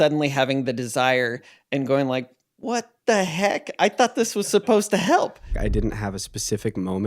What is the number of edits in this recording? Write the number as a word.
one